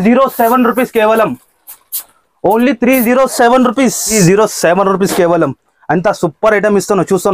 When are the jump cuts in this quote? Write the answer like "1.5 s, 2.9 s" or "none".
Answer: 4.1 s